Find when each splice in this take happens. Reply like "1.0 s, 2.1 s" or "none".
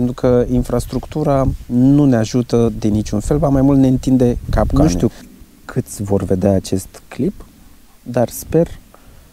4.7 s